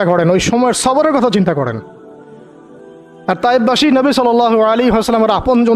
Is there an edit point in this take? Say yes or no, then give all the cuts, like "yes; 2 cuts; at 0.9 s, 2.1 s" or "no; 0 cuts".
no; 0 cuts